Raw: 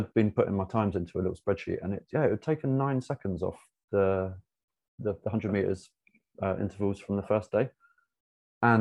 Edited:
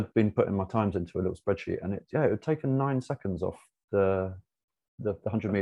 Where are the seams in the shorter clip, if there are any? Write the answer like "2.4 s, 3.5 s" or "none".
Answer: none